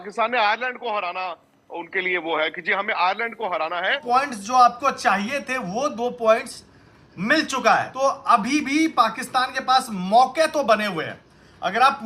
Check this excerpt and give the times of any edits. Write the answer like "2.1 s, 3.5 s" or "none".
4.0 s, 7.9 s